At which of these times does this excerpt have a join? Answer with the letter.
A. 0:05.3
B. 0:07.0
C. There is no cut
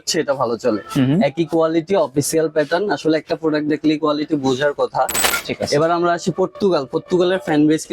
A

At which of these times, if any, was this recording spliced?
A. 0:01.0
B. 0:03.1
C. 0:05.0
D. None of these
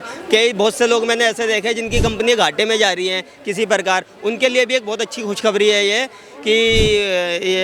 D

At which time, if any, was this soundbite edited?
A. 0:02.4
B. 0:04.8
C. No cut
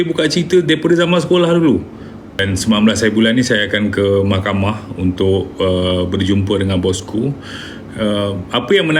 A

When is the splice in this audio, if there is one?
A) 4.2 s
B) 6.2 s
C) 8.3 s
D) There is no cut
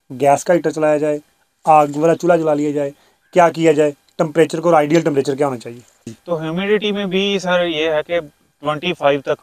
B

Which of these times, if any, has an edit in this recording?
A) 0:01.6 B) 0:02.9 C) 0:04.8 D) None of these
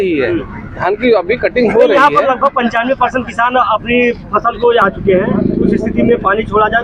C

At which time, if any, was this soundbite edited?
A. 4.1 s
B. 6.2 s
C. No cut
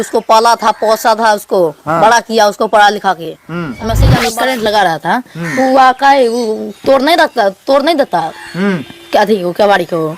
A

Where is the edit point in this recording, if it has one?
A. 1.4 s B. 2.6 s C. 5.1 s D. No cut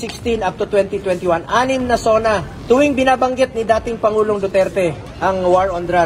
D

